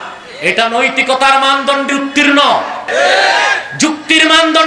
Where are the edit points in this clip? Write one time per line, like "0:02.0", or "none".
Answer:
0:02.8